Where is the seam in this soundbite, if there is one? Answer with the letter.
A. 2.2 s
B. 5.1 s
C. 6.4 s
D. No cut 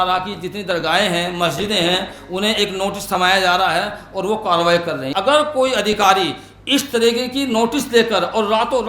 B